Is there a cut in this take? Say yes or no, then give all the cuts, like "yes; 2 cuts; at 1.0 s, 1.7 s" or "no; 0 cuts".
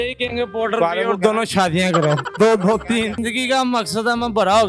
yes; 1 cut; at 3.2 s